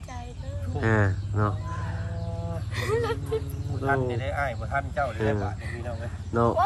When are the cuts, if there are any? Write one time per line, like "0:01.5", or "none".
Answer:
none